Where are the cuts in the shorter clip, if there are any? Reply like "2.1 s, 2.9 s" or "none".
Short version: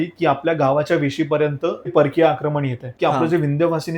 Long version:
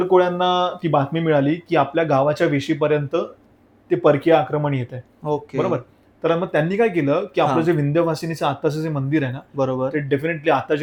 1.9 s, 2.9 s